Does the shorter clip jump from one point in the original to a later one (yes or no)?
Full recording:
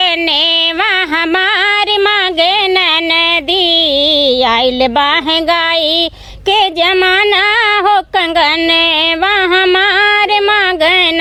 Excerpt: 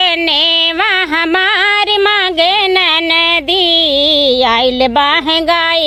no